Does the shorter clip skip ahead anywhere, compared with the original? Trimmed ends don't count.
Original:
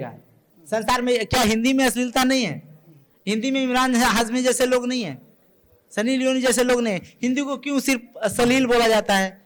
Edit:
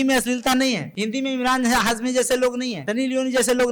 yes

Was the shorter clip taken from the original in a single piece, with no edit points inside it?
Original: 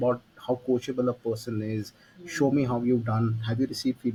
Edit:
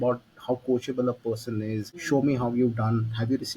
no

